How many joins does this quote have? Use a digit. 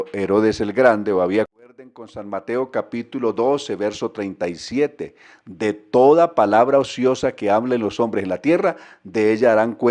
1